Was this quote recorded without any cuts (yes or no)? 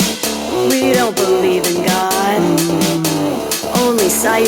yes